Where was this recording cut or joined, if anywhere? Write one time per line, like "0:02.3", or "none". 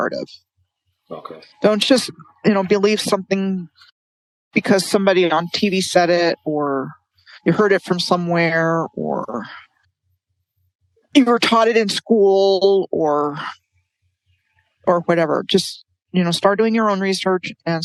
none